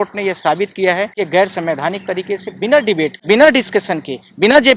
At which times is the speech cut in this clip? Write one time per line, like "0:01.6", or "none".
0:01.1
0:03.2